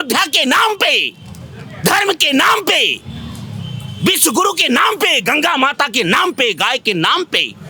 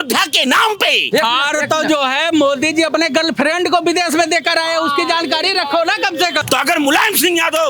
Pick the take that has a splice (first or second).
second